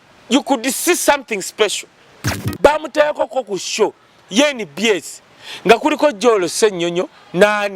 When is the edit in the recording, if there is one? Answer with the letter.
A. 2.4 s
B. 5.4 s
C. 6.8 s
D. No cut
A